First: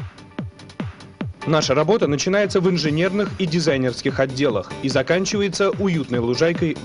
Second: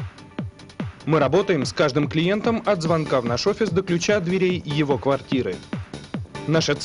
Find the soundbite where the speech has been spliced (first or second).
first